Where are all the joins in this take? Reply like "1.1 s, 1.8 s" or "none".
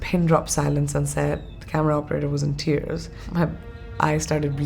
3.2 s